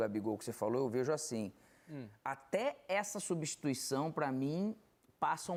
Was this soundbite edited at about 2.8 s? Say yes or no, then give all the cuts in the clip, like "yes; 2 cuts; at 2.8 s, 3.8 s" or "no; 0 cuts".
no; 0 cuts